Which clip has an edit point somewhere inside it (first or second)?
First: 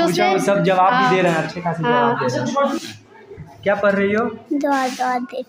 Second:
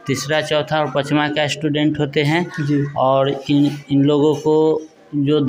first